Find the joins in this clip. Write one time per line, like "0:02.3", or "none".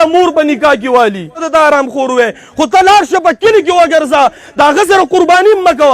0:01.4